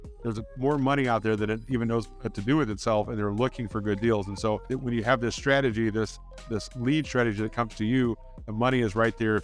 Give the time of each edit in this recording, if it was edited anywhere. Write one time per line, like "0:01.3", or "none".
0:04.7